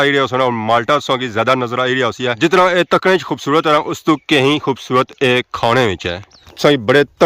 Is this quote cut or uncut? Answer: cut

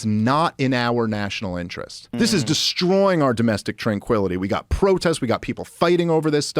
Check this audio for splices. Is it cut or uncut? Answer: cut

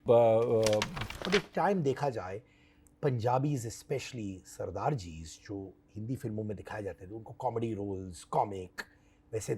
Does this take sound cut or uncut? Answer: cut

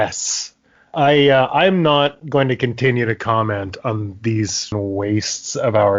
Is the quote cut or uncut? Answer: cut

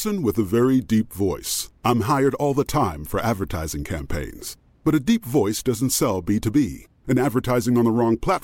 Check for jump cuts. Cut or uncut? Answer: uncut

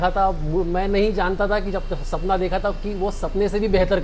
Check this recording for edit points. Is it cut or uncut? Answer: uncut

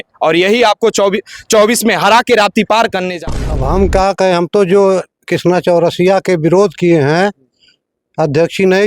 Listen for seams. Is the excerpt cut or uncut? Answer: cut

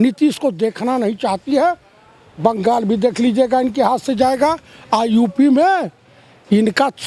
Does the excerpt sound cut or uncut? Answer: uncut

